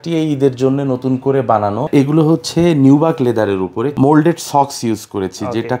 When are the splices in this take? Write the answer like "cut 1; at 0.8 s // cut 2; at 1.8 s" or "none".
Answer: cut 1; at 1.9 s // cut 2; at 3.9 s